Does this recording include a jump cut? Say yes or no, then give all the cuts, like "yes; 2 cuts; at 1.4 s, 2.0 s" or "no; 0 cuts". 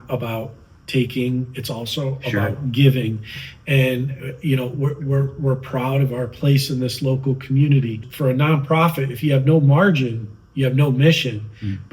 yes; 1 cut; at 8.1 s